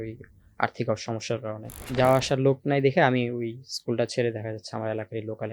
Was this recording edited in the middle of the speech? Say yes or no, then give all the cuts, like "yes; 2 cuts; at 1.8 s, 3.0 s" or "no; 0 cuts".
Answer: yes; 1 cut; at 1.8 s